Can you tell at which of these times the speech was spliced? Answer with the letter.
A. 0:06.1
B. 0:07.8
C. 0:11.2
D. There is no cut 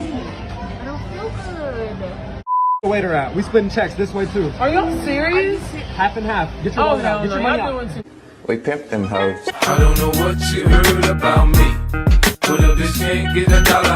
D